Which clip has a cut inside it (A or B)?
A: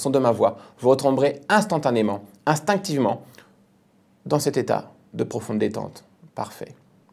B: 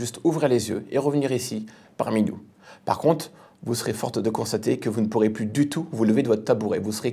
A